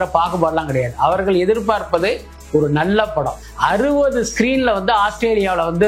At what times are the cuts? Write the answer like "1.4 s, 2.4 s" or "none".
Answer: 3.4 s